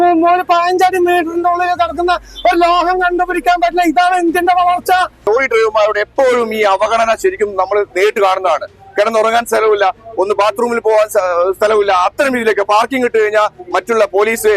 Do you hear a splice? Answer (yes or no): yes